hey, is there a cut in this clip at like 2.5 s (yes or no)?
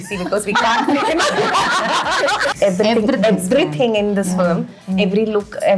yes